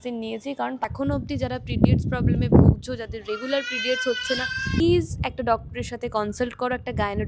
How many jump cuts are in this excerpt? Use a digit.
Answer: 2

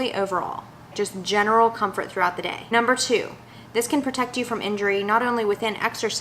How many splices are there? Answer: 2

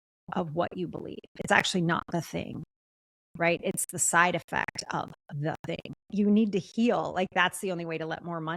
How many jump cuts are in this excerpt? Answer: 1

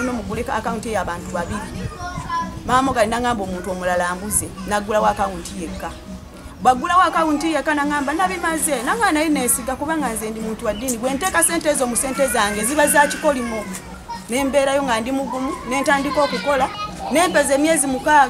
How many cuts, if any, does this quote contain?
2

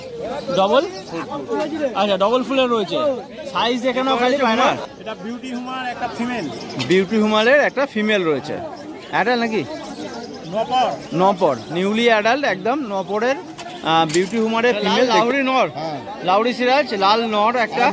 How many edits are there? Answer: 2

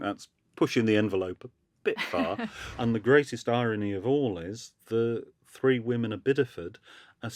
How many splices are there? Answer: 1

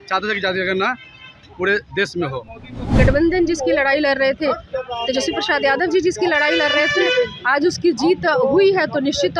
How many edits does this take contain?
1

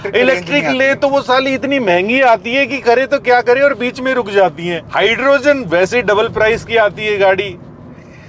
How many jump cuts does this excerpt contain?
1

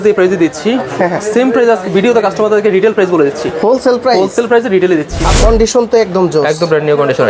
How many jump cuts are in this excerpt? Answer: 1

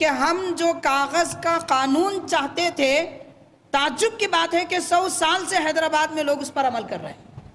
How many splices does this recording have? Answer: 0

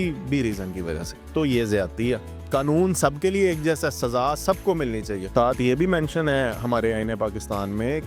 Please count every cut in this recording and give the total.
1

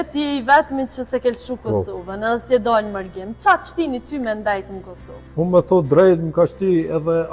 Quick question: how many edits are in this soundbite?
0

